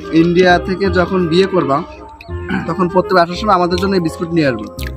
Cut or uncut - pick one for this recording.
uncut